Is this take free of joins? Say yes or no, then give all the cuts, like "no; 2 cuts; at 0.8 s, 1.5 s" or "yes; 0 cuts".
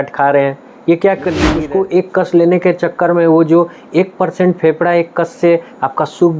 no; 1 cut; at 1.6 s